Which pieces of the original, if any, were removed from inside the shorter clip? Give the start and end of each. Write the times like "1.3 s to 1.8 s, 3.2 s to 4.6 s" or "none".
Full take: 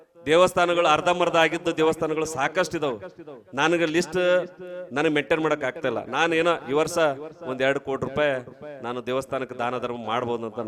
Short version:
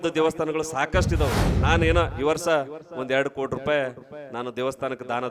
3.2 s to 6.1 s